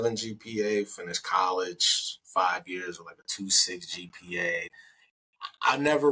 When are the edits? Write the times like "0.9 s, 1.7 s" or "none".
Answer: 4.7 s